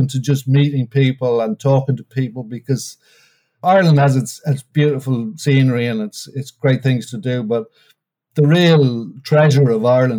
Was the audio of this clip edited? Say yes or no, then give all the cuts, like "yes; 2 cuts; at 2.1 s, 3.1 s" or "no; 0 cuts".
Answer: yes; 2 cuts; at 3.6 s, 4.7 s